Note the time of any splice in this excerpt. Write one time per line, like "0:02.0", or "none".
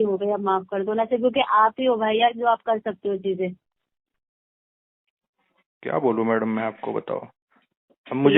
none